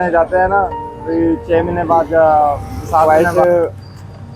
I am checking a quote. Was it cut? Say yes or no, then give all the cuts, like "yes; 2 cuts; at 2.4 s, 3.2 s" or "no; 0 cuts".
yes; 1 cut; at 3.1 s